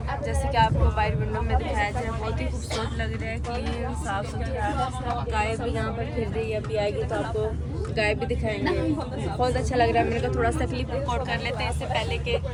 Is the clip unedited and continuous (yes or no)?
yes